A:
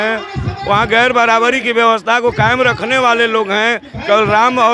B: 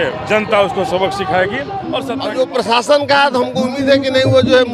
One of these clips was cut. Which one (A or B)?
B